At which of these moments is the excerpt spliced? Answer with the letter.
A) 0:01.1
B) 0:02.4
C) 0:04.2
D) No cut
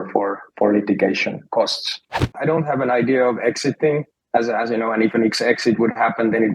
B